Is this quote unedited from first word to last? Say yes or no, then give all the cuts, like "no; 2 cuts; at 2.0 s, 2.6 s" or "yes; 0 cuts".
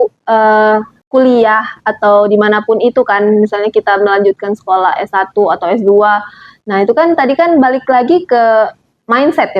no; 1 cut; at 1.0 s